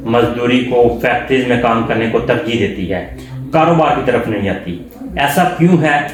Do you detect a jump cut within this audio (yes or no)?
no